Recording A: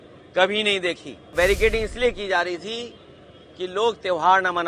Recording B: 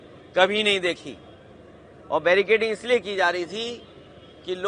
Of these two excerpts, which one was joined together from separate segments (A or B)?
A